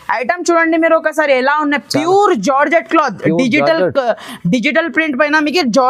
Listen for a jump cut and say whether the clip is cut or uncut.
uncut